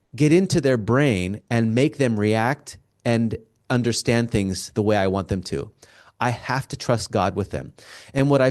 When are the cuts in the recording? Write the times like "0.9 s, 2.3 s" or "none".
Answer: none